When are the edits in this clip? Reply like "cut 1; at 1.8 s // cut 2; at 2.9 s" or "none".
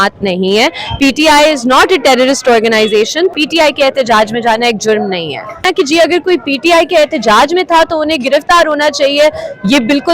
cut 1; at 3.3 s // cut 2; at 5.6 s